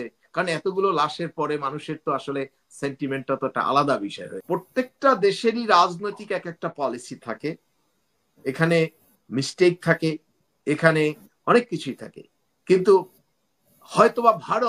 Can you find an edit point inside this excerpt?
yes; 1 cut; at 4.3 s

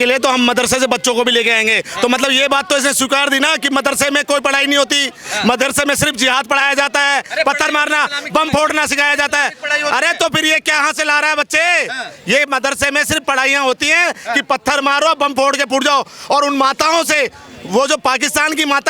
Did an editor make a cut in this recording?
no; 0 cuts

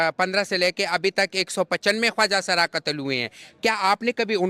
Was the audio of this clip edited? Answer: no; 0 cuts

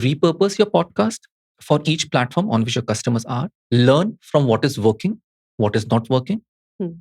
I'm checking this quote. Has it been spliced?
yes; 1 cut; at 3.5 s

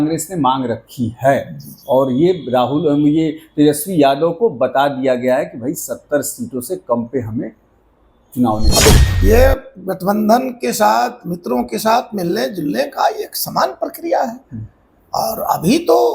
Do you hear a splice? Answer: yes; 1 cut; at 8.9 s

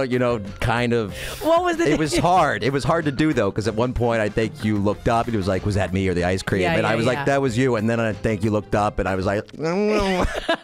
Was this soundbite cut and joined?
no; 0 cuts

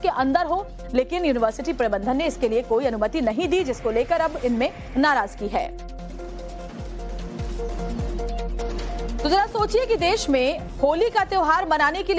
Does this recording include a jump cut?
no; 0 cuts

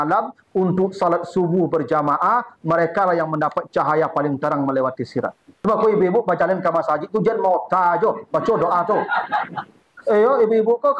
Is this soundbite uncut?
no; 1 cut; at 5.4 s

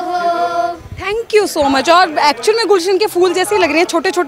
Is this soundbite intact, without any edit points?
yes; 0 cuts

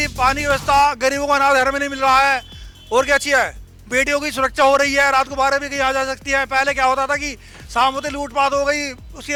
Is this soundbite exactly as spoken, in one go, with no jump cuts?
yes; 0 cuts

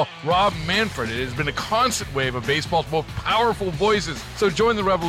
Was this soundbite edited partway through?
no; 0 cuts

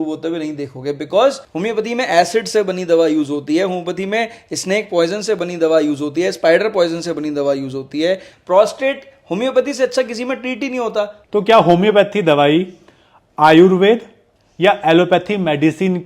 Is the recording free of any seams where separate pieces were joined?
no; 3 cuts; at 1.5 s, 8.3 s, 11.2 s

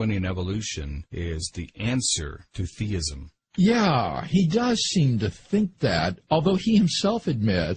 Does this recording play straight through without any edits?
no; 1 cut; at 5.0 s

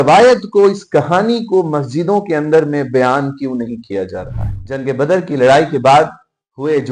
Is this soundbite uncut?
no; 1 cut; at 4.6 s

